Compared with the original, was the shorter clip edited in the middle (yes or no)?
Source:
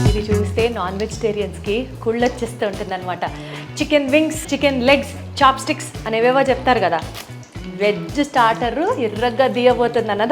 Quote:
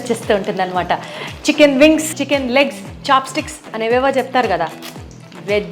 no